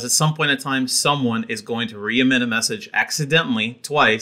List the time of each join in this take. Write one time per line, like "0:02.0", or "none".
none